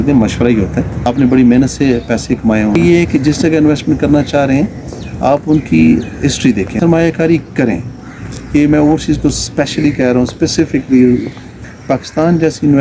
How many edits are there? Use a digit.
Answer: 4